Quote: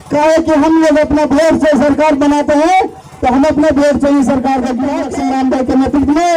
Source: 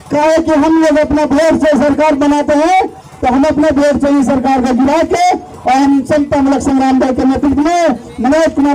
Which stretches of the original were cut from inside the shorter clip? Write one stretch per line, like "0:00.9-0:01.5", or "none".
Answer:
0:05.0-0:06.5